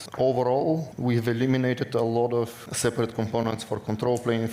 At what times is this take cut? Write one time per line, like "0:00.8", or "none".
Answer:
0:00.9
0:02.6

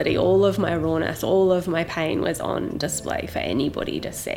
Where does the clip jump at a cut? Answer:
none

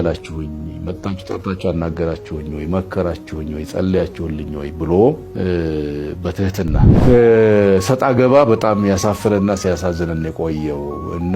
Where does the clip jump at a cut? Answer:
0:06.9

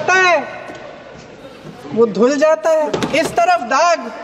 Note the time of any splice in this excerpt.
0:02.9

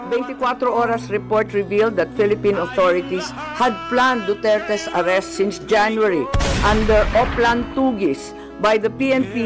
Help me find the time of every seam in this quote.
none

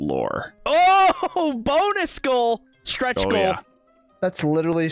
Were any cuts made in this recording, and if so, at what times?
none

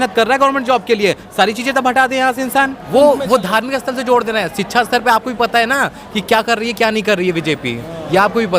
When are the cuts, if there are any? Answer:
0:02.8

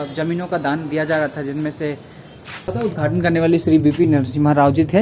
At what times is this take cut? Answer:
0:02.7

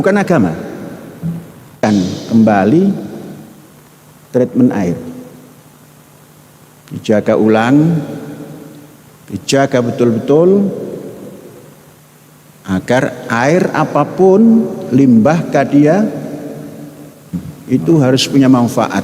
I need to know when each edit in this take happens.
0:01.8

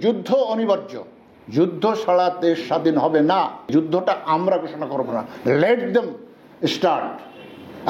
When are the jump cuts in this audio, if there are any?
0:03.7

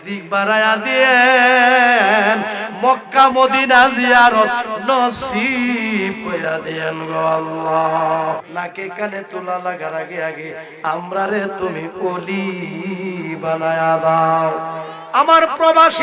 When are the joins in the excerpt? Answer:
0:08.4

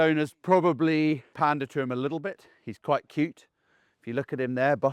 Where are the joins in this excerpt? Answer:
0:01.3

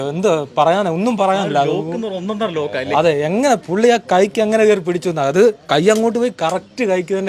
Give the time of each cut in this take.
none

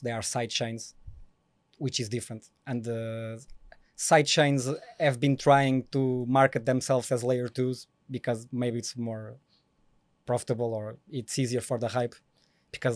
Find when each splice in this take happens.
none

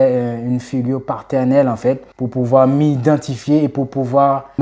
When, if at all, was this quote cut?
none

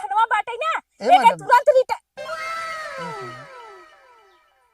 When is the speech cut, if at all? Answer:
0:02.1

